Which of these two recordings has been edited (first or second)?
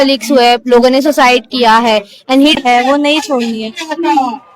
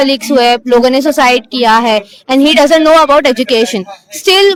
first